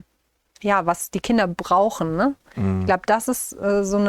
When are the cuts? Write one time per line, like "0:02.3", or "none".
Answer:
none